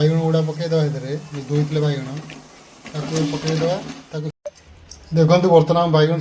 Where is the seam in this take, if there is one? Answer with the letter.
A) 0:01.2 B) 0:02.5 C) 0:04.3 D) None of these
C